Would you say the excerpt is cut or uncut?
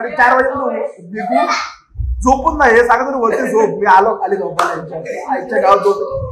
uncut